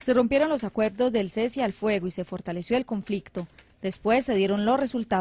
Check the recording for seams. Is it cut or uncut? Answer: cut